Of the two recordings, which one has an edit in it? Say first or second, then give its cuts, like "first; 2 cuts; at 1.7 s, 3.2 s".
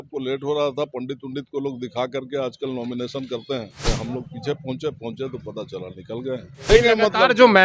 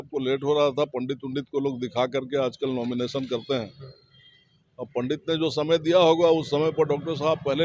first; 2 cuts; at 3.8 s, 6.7 s